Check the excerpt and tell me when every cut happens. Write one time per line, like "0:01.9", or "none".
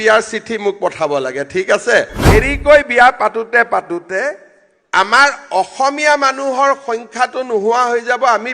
0:02.2